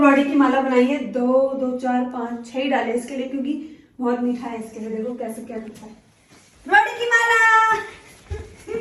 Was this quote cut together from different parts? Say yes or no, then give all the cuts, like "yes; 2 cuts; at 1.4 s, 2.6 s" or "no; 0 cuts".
no; 0 cuts